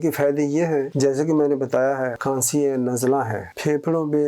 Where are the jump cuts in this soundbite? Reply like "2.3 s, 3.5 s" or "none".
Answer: 0.9 s, 2.2 s